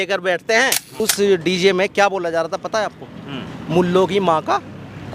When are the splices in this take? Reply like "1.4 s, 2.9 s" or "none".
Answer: 1.0 s